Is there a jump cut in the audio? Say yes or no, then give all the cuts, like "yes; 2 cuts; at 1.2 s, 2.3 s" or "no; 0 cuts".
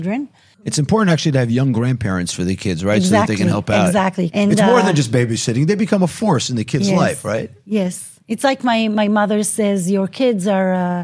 yes; 2 cuts; at 0.8 s, 4.3 s